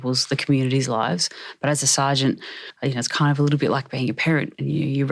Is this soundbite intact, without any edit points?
no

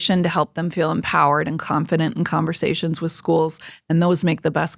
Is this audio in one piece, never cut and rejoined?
yes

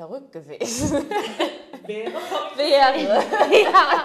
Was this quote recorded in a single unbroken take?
yes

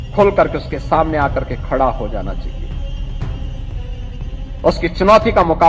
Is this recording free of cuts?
no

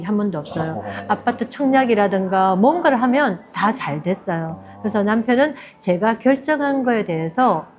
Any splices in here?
no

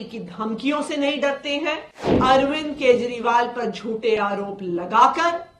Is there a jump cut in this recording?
yes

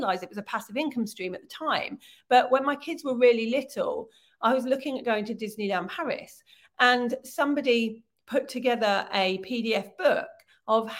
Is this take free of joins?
yes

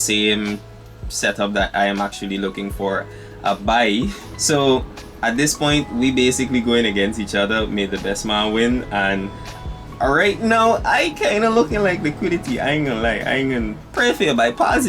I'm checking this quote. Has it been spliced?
yes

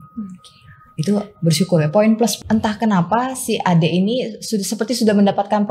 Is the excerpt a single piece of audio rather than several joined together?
no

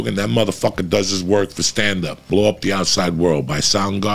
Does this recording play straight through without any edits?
no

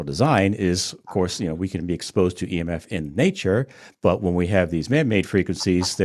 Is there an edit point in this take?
no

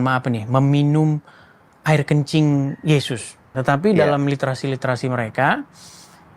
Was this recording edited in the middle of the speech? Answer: yes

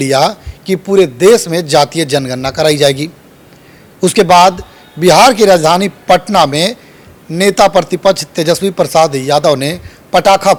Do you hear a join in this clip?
no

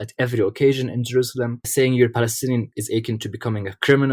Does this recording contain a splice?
yes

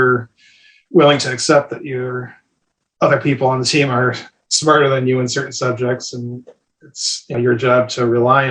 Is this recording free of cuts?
no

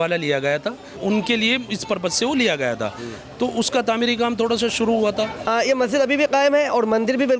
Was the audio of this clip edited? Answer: yes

